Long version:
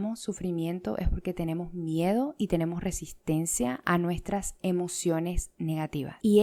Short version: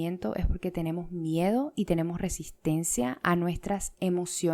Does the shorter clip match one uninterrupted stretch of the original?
yes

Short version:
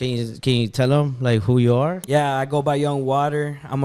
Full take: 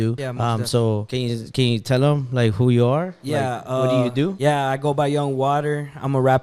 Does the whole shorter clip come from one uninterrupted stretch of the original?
no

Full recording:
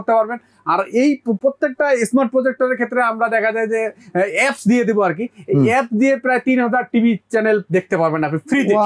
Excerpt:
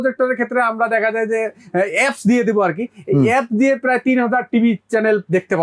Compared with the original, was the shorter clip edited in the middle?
no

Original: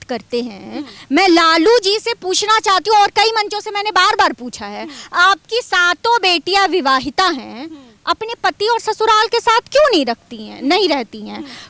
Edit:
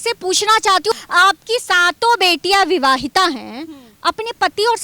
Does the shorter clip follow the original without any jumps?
no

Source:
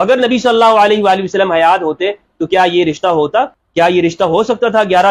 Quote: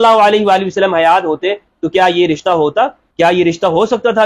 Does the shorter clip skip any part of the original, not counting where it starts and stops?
no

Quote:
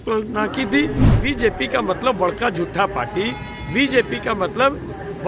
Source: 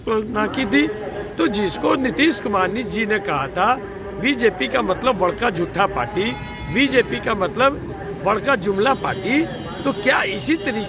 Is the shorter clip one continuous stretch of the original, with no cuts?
no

